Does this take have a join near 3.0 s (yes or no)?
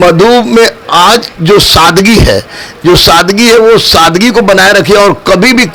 no